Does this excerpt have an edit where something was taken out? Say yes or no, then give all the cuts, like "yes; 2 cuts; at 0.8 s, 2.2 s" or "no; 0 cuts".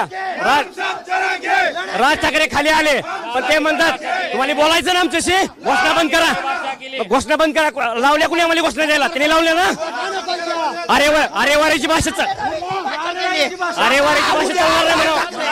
no; 0 cuts